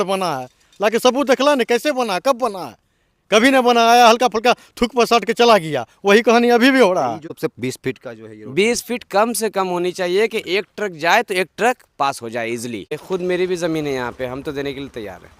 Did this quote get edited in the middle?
yes; 2 cuts; at 7.3 s, 12.9 s

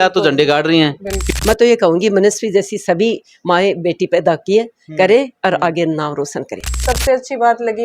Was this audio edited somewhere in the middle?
yes; 2 cuts; at 1.2 s, 6.8 s

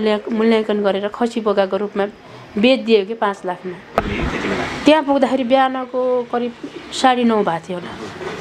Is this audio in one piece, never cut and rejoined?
no; 1 cut; at 3.9 s

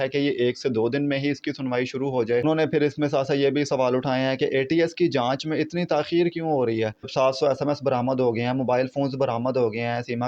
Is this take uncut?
no; 2 cuts; at 2.4 s, 7.1 s

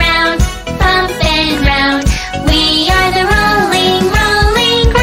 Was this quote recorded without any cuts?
yes; 0 cuts

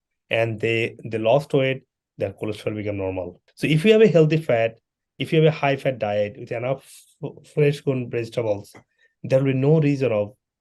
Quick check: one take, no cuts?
no; 1 cut; at 3.4 s

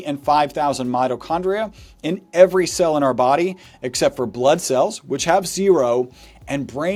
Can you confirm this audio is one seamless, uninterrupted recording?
yes; 0 cuts

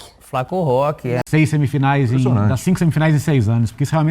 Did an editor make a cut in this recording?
yes; 1 cut; at 1.2 s

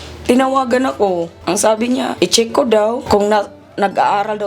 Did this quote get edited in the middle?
yes; 3 cuts; at 1.3 s, 2.1 s, 3.0 s

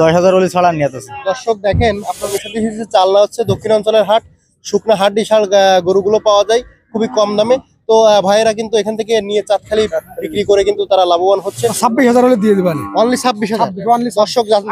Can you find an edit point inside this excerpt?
yes; 2 cuts; at 2.3 s, 11.6 s

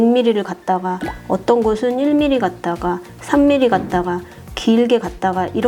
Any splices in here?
no; 0 cuts

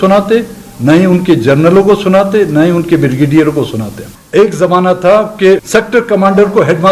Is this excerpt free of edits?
no; 2 cuts; at 4.1 s, 5.6 s

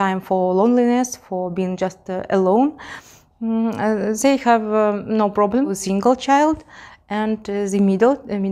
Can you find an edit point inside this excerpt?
yes; 1 cut; at 5.7 s

